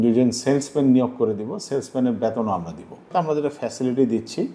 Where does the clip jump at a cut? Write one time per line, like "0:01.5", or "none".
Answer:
0:03.1